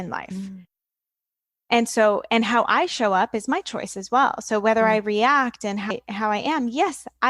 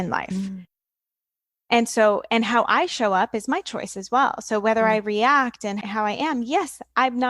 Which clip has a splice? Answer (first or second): second